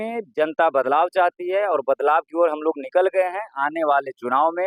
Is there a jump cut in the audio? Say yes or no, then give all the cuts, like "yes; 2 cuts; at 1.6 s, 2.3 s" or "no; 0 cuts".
no; 0 cuts